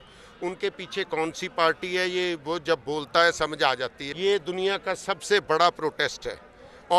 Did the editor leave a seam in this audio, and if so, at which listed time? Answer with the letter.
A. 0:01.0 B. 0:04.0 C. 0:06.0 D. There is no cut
B